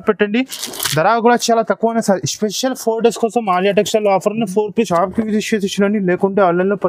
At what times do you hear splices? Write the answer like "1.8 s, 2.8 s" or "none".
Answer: 4.9 s